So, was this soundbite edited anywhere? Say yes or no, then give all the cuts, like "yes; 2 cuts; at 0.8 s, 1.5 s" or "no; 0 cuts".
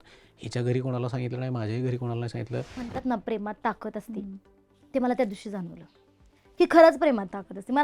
yes; 1 cut; at 2.9 s